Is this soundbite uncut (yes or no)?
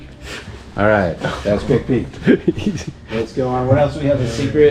yes